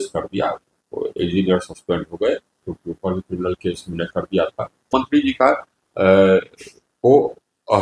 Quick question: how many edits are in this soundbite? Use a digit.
2